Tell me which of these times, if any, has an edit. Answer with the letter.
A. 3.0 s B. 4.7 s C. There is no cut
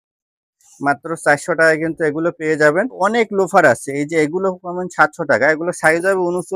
A